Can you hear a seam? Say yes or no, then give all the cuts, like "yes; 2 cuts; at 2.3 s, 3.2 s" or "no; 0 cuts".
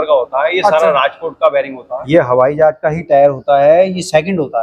yes; 1 cut; at 2.0 s